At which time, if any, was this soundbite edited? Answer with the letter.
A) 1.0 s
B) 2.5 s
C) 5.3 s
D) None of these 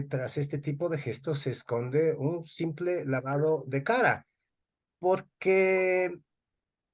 D